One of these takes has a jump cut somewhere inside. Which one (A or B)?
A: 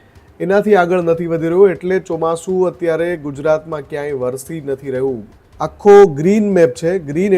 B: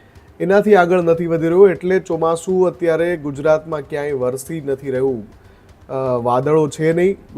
A